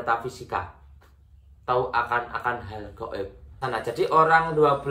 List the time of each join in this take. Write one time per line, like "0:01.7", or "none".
0:03.6